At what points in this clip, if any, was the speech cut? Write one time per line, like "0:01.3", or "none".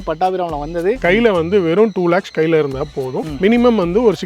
0:01.0